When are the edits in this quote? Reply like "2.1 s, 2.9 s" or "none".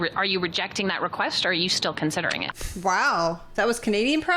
2.5 s

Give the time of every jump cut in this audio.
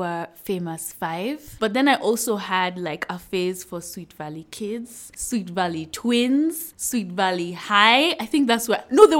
1.6 s

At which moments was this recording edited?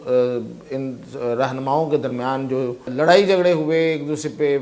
2.9 s

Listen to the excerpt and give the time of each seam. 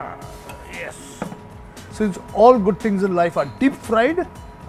none

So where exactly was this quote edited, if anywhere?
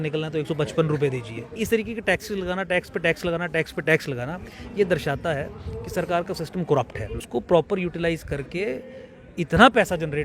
1.5 s, 7.2 s

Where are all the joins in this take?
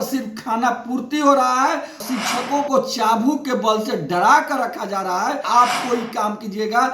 2.0 s, 5.4 s

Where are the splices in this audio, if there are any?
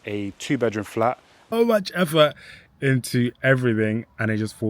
1.3 s

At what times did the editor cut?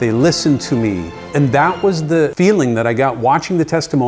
1.2 s, 2.3 s

